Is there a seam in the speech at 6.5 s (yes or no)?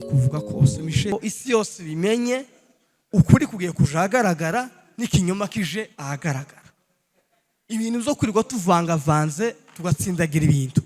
no